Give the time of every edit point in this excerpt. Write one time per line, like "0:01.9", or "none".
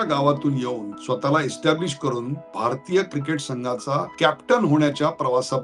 0:00.9
0:02.4
0:04.1